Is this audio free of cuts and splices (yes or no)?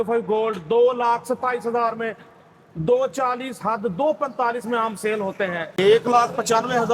no